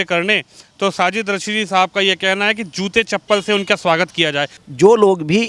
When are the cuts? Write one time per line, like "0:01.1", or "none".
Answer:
0:04.5